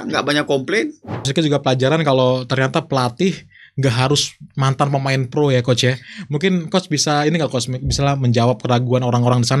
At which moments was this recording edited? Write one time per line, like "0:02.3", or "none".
0:01.3